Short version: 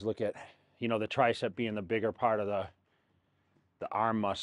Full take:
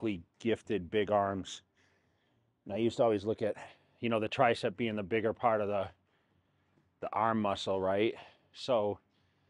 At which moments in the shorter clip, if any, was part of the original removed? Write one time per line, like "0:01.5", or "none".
none